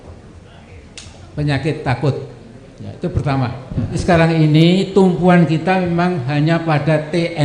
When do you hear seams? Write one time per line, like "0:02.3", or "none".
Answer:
0:04.0